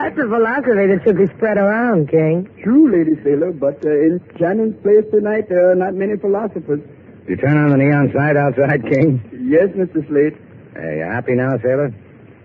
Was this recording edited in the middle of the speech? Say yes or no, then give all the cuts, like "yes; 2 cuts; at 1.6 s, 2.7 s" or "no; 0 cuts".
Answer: no; 0 cuts